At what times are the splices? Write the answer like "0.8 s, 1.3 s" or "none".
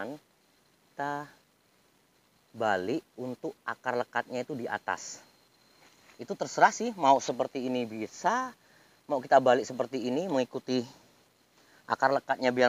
0.9 s

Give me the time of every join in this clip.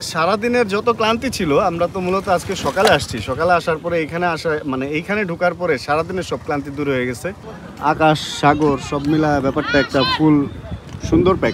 7.4 s

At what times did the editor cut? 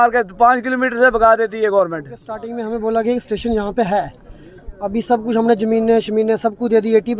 2.5 s

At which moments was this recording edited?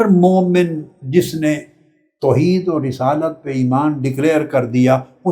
none

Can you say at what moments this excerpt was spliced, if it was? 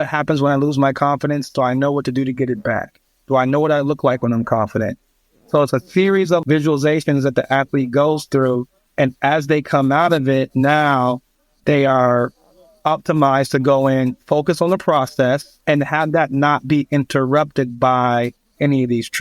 6.4 s, 15.5 s

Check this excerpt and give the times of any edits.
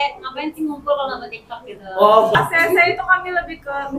2.3 s

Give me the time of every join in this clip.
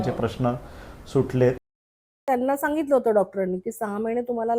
2.2 s

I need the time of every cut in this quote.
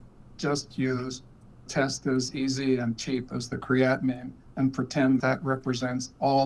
5.2 s

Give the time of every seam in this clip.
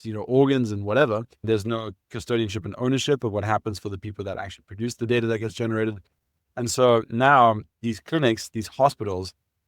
1.4 s

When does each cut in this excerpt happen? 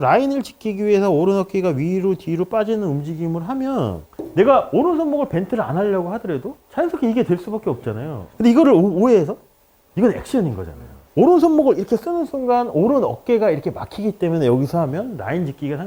none

